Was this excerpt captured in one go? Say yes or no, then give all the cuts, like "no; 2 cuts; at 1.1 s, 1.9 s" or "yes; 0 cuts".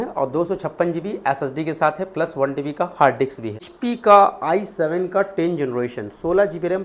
no; 1 cut; at 3.7 s